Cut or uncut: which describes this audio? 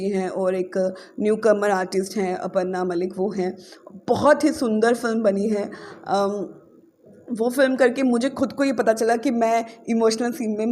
uncut